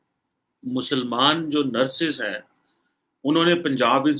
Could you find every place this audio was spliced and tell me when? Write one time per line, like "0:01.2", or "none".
none